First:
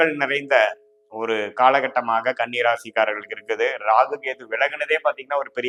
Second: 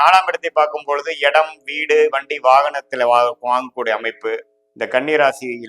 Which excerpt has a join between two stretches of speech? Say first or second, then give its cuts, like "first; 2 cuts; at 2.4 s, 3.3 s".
second; 1 cut; at 4.6 s